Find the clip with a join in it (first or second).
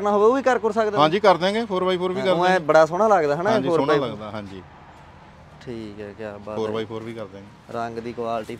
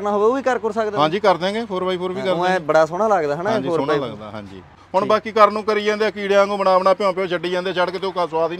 second